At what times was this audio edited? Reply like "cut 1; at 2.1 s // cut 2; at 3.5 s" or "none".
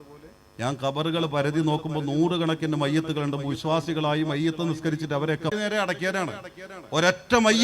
none

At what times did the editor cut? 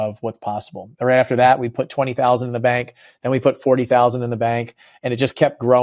none

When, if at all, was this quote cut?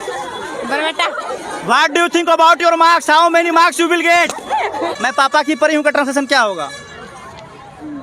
cut 1; at 4.9 s

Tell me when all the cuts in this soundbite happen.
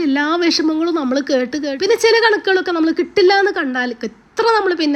cut 1; at 1.7 s

